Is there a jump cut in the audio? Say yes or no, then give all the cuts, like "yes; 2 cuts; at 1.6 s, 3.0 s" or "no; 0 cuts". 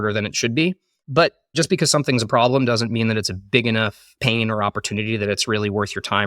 yes; 2 cuts; at 1.1 s, 4.0 s